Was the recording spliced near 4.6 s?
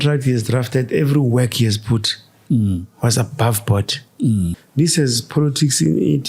yes; 1 cut; at 4.6 s

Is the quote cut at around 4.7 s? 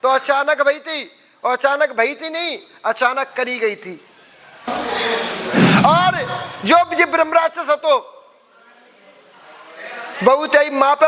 yes; 1 cut; at 4.7 s

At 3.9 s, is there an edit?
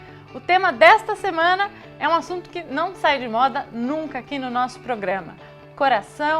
yes; 1 cut; at 3.9 s

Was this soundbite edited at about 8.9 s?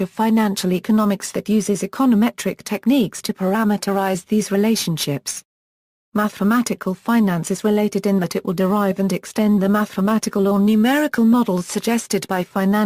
yes; 1 cut; at 8.9 s

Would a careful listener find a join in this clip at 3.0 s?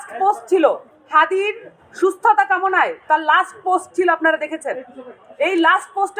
no; 1 cut; at 0.9 s

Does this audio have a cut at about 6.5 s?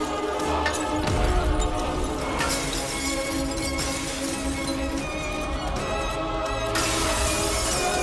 yes; 3 cuts; at 2.2 s, 5.4 s, 6.5 s

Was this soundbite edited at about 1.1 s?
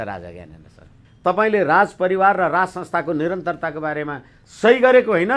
yes; 1 cut; at 1.1 s

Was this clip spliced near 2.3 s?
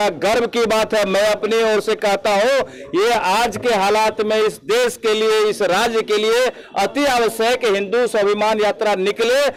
no; 0 cuts

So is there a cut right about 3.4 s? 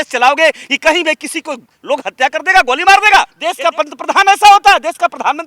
yes; 1 cut; at 3.4 s

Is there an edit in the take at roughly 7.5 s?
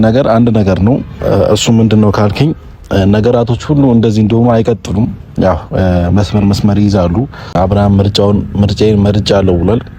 yes; 1 cut; at 7.5 s

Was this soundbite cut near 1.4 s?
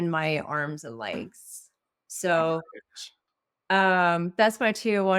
no; 0 cuts

